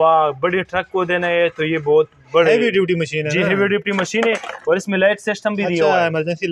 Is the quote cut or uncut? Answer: uncut